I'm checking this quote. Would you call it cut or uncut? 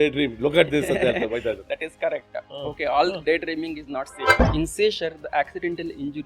cut